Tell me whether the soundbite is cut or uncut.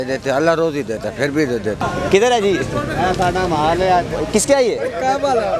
cut